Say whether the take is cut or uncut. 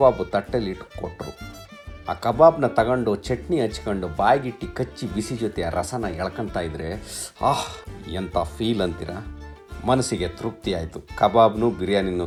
uncut